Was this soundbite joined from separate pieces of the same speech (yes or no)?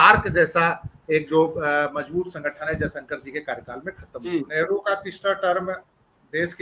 yes